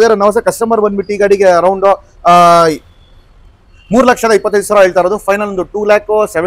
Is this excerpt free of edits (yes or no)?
yes